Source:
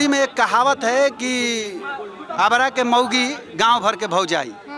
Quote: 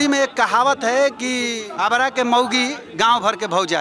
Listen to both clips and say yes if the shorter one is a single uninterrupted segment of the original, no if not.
no